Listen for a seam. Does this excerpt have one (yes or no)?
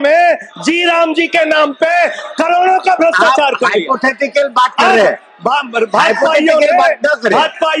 no